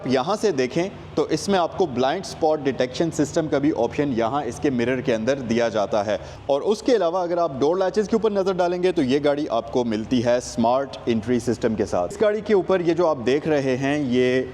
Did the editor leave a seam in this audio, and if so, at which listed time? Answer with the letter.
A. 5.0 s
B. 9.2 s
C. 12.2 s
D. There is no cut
C